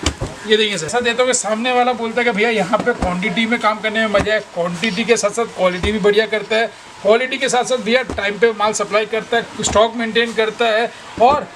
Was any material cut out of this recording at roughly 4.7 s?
no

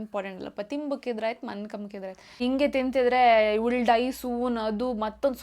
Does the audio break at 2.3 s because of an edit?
yes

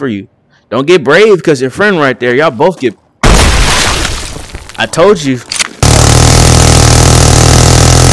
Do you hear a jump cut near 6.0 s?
yes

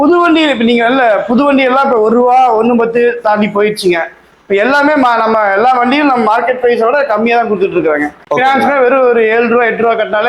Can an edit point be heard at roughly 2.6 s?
no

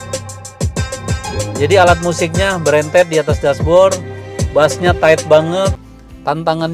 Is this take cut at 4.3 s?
no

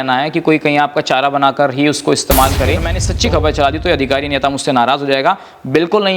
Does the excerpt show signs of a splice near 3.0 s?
yes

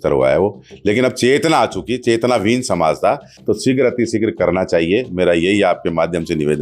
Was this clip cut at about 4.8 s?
no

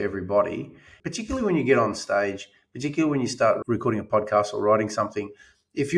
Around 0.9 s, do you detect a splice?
yes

